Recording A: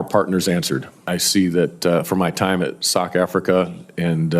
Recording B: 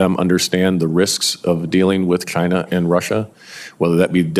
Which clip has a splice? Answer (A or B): A